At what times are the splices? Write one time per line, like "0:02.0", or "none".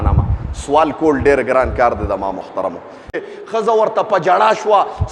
0:03.2